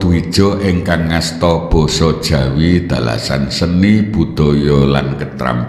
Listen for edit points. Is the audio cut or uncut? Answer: uncut